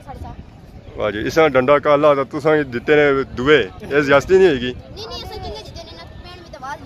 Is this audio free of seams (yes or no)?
yes